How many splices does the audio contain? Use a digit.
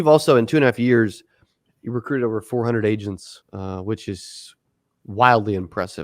1